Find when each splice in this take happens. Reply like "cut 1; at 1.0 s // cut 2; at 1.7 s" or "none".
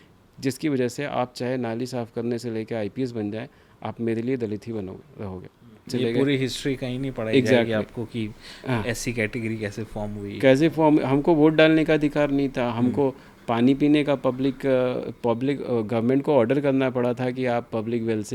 cut 1; at 5.9 s